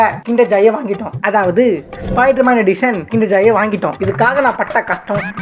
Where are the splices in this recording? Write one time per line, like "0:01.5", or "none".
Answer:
0:04.0